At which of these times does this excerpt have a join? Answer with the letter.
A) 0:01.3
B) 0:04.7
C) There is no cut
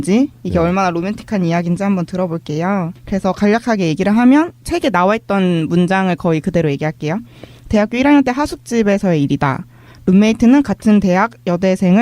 B